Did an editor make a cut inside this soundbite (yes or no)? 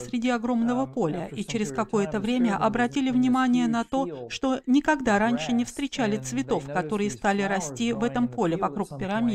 no